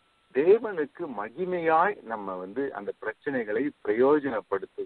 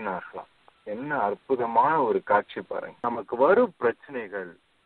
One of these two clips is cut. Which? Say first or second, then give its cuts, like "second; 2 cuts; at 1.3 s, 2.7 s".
second; 1 cut; at 3.0 s